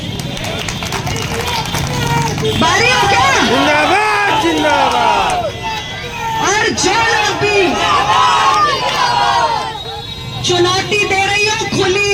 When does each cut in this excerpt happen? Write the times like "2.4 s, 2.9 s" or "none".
none

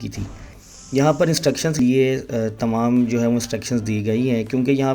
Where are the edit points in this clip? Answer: 1.8 s

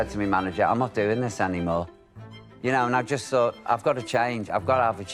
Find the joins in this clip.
2.1 s

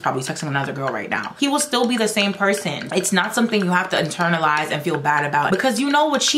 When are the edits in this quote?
1.3 s, 2.8 s, 5.5 s

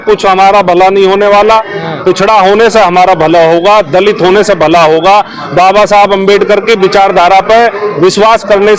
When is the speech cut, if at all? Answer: none

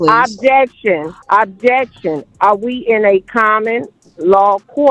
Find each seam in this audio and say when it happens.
1.1 s

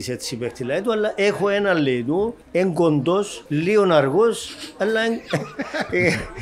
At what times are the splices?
2.4 s, 3.4 s

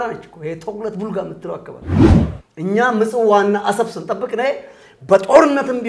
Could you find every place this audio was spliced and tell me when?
1.9 s, 2.4 s

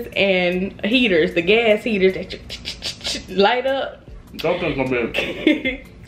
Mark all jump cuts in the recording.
none

